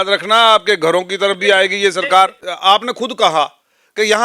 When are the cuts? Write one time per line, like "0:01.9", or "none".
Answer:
0:02.5